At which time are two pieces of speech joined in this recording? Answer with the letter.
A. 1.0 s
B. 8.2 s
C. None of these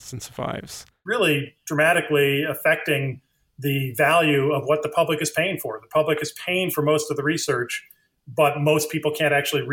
A